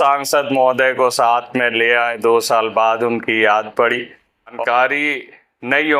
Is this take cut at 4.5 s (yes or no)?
yes